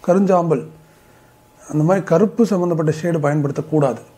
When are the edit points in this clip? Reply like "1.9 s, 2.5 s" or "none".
none